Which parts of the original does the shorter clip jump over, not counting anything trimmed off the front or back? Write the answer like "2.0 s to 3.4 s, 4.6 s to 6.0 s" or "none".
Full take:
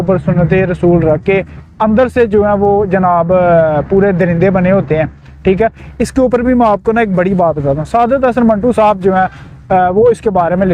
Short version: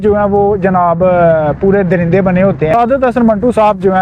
5.0 s to 7.9 s